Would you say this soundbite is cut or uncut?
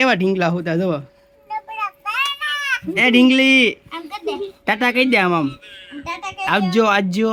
uncut